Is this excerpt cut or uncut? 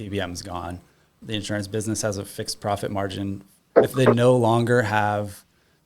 cut